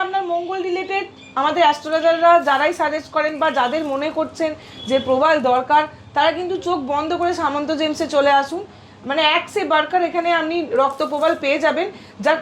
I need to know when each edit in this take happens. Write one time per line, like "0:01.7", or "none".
none